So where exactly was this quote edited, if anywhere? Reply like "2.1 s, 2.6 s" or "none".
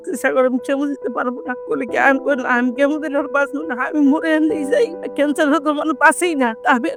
none